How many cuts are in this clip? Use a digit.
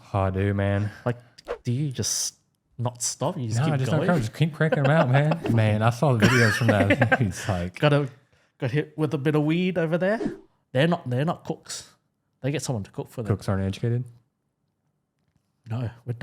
2